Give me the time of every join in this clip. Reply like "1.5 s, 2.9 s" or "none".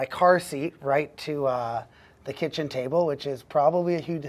none